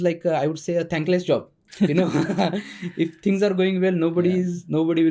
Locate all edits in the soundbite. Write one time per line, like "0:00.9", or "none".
0:01.6